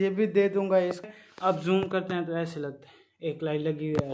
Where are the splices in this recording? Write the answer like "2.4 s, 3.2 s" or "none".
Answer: 1.1 s